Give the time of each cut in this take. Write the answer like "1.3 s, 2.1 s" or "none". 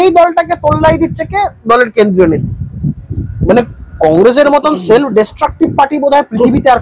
none